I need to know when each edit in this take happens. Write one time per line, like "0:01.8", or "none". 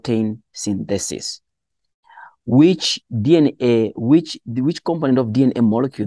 none